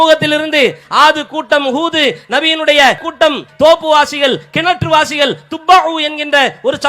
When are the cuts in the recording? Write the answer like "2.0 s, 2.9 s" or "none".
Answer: 3.2 s